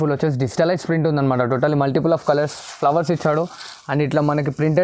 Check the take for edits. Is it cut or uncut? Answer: uncut